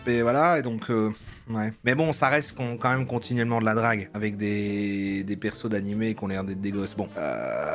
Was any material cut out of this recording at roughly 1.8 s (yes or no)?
no